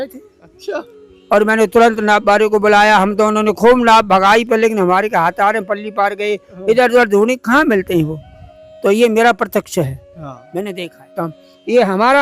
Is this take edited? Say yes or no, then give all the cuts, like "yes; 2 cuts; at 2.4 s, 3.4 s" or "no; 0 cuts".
yes; 1 cut; at 11.1 s